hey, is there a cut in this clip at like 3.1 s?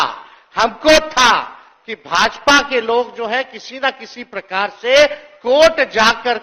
no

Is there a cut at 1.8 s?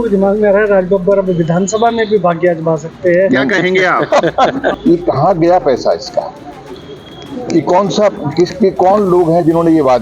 no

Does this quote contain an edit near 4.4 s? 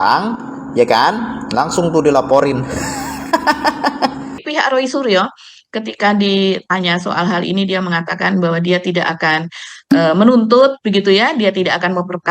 yes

